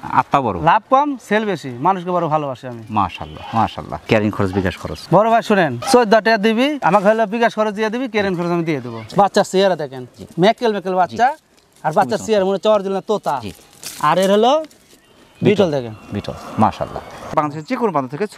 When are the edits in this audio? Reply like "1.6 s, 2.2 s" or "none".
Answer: none